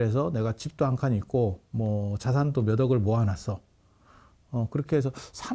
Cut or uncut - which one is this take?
uncut